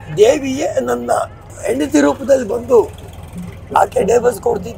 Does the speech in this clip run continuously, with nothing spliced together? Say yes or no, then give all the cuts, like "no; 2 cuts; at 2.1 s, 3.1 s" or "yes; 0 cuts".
no; 1 cut; at 1.4 s